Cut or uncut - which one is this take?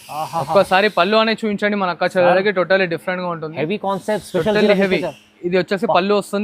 uncut